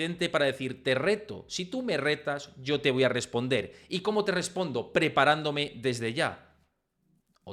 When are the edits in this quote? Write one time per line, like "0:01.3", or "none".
none